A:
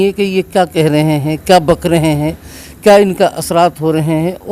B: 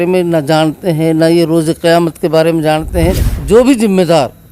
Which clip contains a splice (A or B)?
B